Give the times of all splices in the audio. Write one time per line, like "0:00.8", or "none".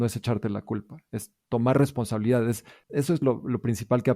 0:02.8